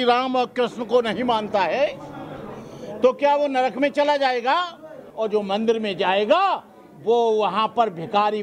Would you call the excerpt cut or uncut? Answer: cut